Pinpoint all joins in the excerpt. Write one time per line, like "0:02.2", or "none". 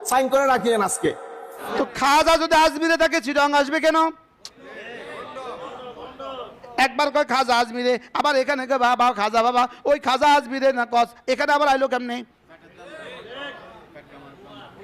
0:01.5